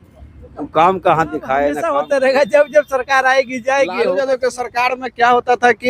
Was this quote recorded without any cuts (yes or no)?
no